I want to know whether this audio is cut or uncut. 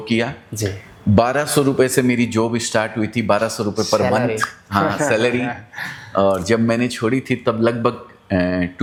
uncut